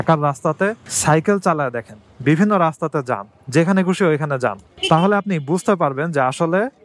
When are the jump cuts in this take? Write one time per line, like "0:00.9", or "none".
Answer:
none